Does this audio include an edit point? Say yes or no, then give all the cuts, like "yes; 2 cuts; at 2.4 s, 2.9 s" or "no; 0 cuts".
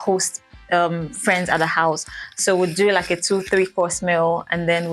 no; 0 cuts